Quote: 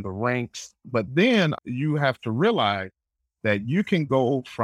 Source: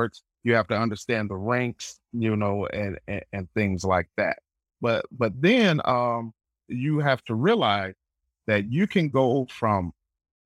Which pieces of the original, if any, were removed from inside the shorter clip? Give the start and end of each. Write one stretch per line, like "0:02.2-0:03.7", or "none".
0:02.1-0:05.1
0:05.8-0:06.6